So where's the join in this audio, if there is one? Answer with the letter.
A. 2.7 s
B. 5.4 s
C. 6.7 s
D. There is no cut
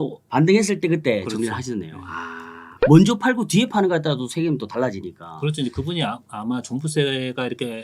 A